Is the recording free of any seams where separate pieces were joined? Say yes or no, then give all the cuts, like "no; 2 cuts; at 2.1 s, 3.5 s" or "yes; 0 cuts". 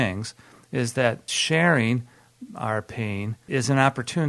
no; 2 cuts; at 1.3 s, 3.4 s